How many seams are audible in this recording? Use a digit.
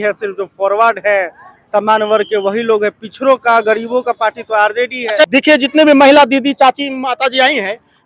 1